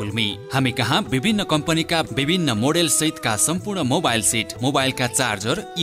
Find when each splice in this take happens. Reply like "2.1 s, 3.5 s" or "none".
none